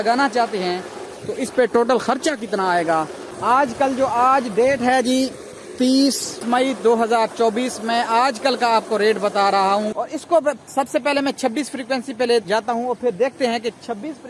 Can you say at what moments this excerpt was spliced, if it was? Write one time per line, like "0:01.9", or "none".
0:03.3
0:06.4
0:10.0